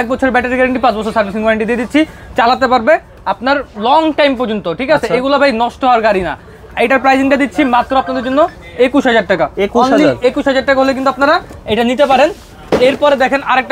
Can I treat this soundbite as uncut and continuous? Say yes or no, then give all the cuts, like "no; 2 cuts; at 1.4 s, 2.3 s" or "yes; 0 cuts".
yes; 0 cuts